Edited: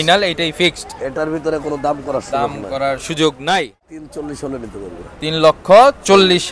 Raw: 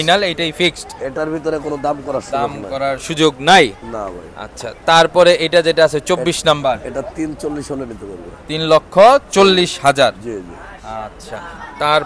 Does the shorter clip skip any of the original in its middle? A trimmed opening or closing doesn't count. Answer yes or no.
yes